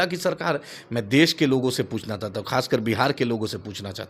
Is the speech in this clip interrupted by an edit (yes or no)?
no